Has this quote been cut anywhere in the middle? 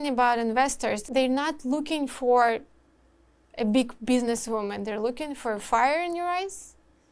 yes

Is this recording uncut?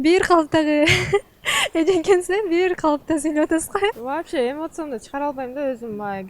no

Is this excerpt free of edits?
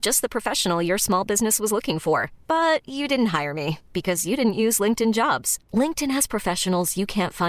yes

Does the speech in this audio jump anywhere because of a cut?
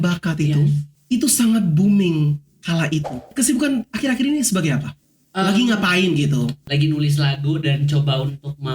yes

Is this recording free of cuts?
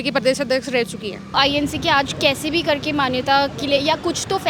no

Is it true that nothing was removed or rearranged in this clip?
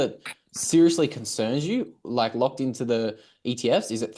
yes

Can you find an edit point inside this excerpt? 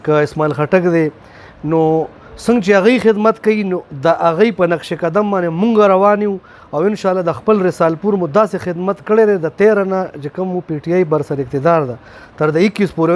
no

